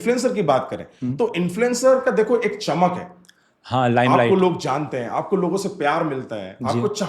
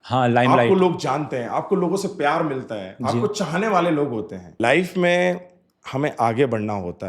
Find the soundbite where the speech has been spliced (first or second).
second